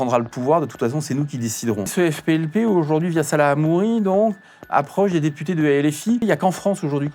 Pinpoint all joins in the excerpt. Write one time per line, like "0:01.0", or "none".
0:01.9
0:06.2